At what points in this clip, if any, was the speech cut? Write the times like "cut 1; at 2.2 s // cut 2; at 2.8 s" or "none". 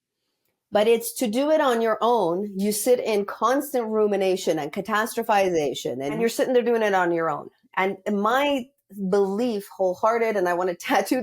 cut 1; at 6.2 s